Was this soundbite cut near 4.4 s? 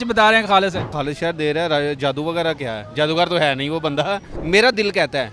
yes; 2 cuts; at 0.9 s, 4.4 s

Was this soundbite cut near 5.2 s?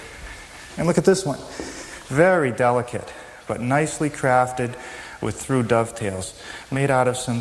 no; 1 cut; at 3.5 s

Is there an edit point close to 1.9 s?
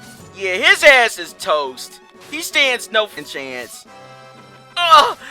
no; 1 cut; at 3.2 s

